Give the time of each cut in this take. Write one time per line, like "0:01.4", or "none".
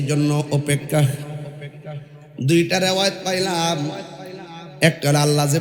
none